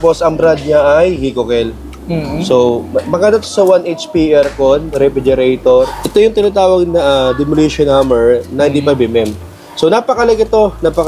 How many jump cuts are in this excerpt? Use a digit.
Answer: 1